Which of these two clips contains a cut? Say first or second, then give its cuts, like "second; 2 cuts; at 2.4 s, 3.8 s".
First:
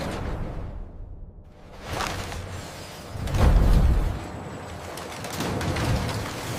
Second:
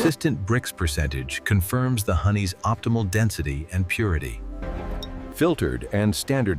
second; 1 cut; at 4.8 s